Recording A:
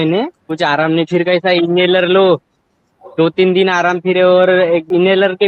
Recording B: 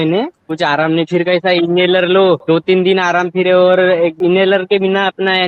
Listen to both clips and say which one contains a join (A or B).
B